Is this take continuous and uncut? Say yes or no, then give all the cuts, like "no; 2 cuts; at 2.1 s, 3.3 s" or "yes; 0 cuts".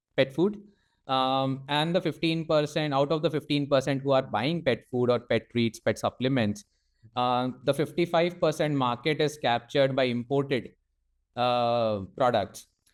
yes; 0 cuts